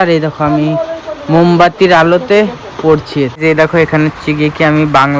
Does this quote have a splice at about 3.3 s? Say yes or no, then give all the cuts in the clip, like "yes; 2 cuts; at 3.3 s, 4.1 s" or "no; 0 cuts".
yes; 1 cut; at 3.3 s